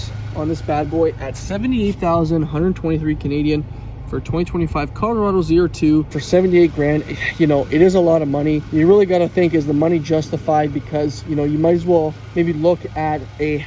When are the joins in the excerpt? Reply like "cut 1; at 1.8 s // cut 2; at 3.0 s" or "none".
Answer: cut 1; at 6.2 s // cut 2; at 8.6 s